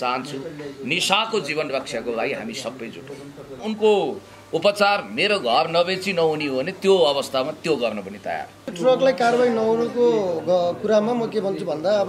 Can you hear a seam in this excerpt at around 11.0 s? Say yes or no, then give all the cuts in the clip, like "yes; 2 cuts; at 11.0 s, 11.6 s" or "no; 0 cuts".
no; 2 cuts; at 3.6 s, 8.7 s